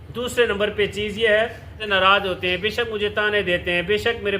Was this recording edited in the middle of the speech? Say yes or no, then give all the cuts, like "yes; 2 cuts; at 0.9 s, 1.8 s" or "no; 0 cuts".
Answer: yes; 1 cut; at 1.8 s